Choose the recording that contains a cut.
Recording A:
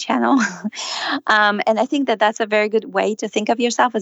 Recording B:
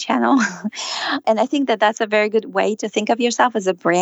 B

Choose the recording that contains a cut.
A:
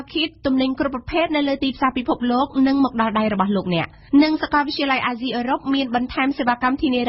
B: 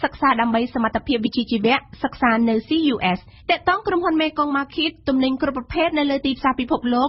B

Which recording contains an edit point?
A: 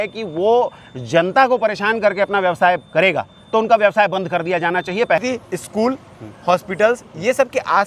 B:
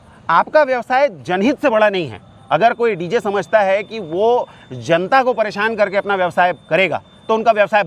A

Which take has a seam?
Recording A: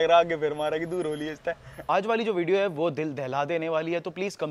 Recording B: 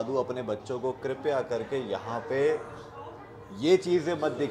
A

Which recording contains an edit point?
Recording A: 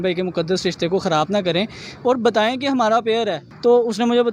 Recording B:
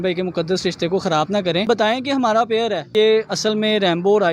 B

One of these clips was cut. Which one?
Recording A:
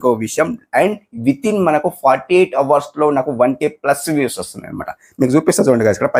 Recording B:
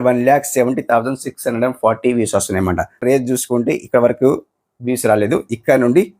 B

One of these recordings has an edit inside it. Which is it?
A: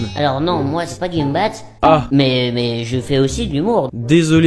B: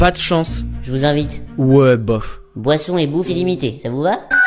A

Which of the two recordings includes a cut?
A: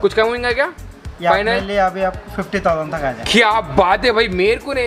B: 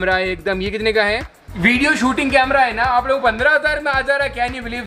B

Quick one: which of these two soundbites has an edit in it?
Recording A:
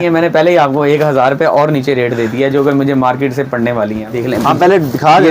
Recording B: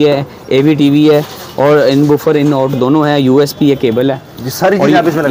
A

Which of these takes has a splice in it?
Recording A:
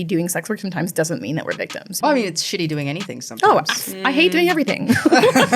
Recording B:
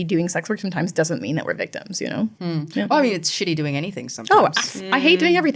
A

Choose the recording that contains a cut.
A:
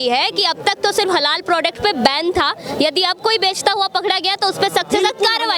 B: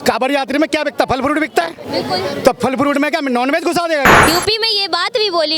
B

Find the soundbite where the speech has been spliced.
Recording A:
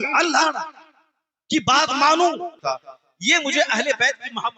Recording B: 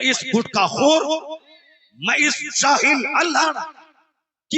A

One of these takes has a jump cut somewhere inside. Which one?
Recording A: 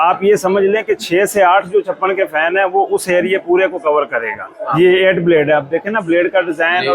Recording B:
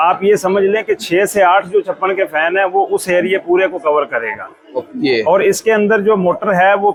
A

